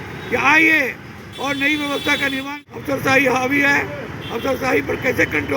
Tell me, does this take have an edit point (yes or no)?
yes